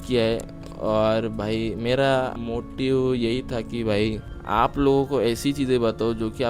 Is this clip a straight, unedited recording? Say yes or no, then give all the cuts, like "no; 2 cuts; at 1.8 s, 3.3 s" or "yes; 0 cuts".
no; 2 cuts; at 2.4 s, 4.3 s